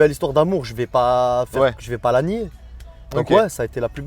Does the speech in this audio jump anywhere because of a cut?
no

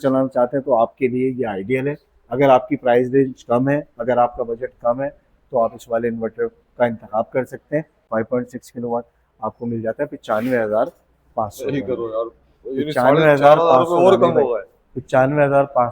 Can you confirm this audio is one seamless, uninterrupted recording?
no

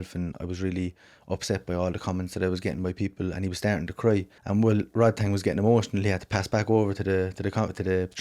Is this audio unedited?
no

